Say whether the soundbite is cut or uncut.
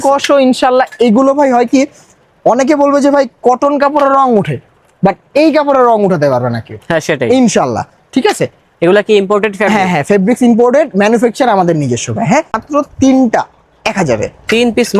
cut